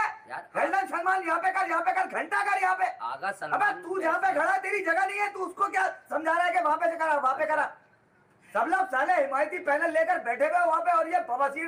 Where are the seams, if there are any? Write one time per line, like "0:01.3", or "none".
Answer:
none